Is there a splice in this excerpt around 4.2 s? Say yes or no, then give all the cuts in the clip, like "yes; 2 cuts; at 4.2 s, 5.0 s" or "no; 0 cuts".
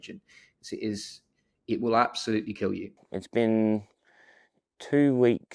no; 1 cut; at 3.0 s